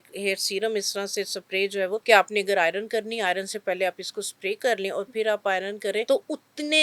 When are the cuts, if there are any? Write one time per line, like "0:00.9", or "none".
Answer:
0:02.0
0:06.0

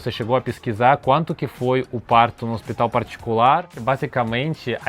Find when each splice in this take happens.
0:03.8

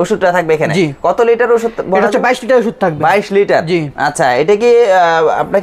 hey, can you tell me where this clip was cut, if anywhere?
none

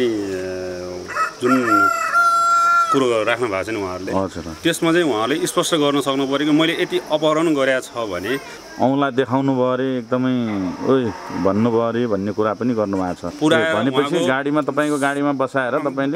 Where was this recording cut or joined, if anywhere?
0:08.5
0:13.2

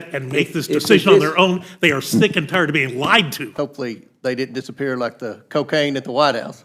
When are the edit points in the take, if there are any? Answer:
0:03.5

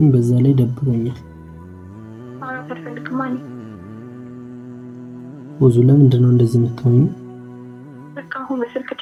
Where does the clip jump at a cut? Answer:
none

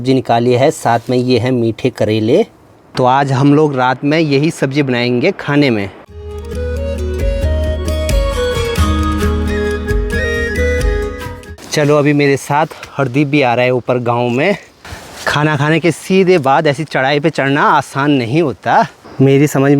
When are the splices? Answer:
none

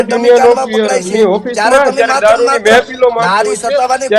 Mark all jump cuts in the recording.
none

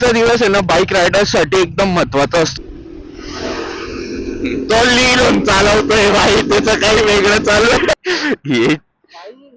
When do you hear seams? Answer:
0:02.6
0:07.9

